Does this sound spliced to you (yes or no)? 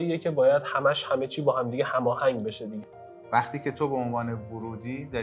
yes